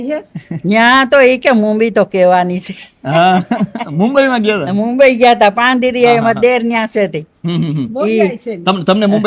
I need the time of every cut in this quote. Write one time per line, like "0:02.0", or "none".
none

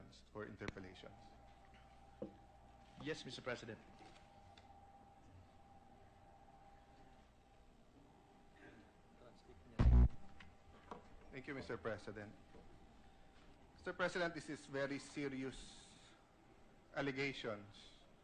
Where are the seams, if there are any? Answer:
none

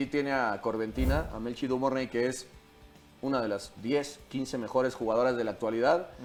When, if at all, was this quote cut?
none

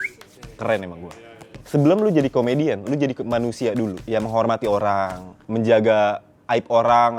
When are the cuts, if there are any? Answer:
0:01.6
0:04.0

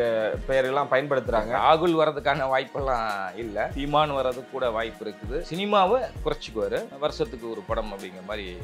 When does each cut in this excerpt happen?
0:03.8
0:05.5
0:06.9

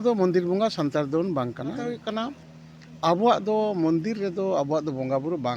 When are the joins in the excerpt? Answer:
0:02.0

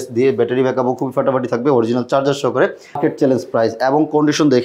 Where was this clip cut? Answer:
0:03.0

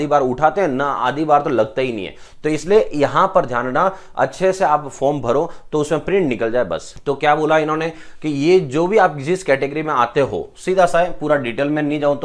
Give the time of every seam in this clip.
none

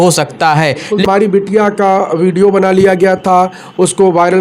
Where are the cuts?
0:01.1

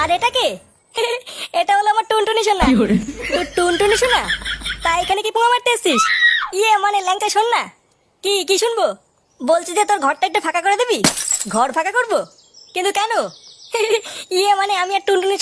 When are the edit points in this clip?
0:01.0

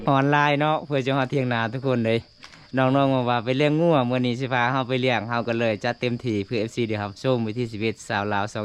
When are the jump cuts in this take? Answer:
none

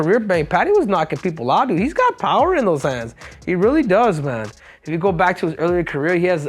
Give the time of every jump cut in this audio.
none

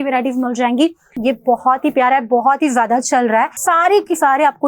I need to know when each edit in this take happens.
0:01.2
0:03.6

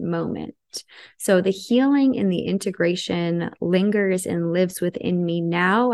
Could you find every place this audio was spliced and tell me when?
none

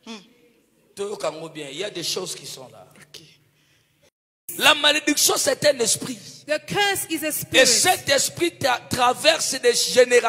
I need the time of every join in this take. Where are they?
0:04.4

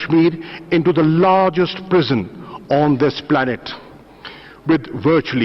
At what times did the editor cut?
none

